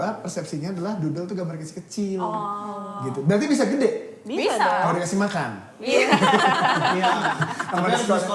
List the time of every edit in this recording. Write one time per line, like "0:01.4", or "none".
none